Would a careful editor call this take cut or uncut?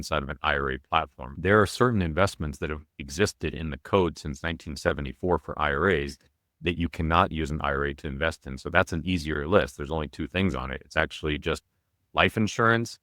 cut